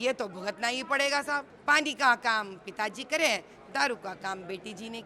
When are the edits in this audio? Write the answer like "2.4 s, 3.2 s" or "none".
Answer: 1.5 s